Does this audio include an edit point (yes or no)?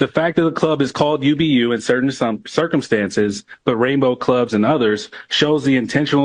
no